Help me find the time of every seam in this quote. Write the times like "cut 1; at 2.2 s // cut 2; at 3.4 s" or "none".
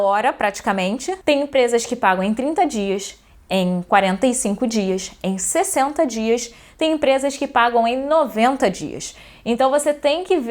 cut 1; at 1.1 s